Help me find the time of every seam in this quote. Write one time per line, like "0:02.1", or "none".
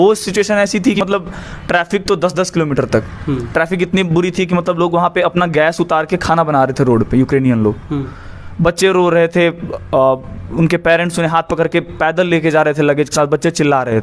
0:01.0